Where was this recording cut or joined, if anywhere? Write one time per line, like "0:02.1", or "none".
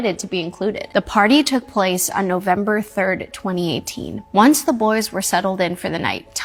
none